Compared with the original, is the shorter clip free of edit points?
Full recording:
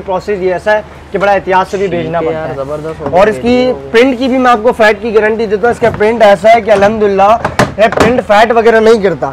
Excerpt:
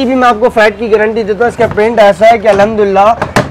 yes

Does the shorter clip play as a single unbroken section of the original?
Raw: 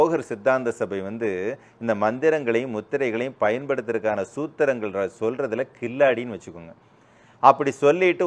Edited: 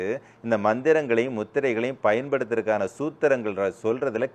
yes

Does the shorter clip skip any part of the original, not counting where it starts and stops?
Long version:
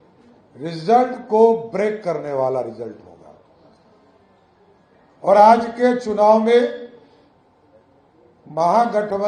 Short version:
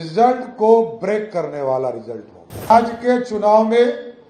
yes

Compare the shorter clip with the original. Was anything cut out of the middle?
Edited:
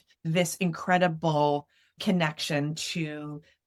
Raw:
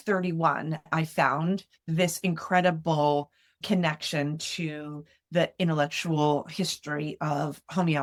no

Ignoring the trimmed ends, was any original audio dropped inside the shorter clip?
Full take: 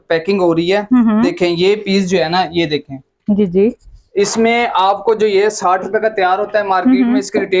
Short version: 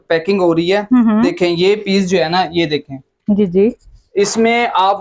no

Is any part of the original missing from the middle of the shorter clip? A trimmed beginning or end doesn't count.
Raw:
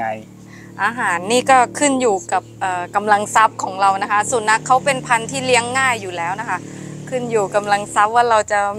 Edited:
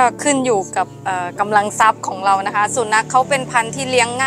no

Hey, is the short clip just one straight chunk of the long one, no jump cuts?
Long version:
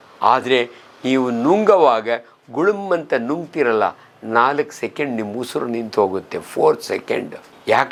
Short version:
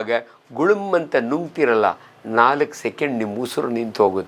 yes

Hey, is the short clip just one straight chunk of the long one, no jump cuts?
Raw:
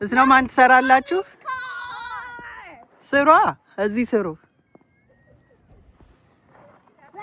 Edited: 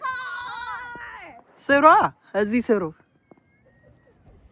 yes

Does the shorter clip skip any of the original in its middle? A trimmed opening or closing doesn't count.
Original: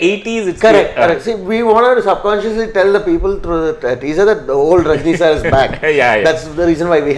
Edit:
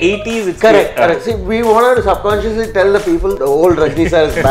yes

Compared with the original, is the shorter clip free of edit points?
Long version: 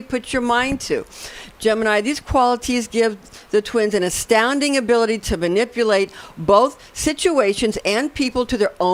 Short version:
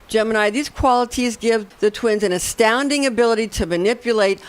no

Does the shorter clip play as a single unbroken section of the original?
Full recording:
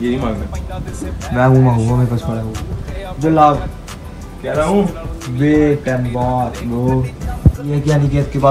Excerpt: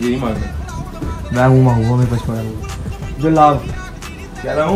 yes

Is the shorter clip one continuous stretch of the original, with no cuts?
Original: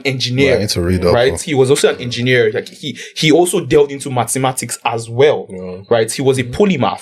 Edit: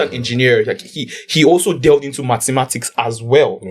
yes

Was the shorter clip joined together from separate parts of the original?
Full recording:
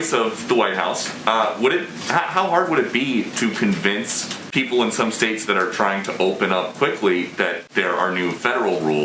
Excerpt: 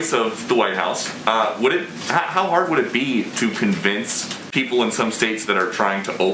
no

